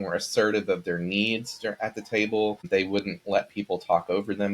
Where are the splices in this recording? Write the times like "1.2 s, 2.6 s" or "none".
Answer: 2.6 s